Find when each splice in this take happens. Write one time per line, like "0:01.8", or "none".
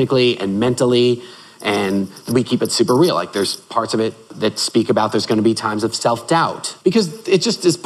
0:02.3
0:04.3
0:06.7